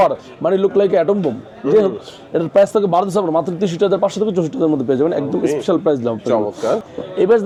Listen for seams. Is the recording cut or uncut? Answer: uncut